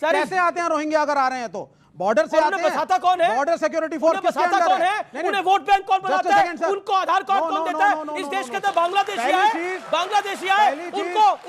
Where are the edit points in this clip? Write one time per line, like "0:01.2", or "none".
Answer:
0:08.1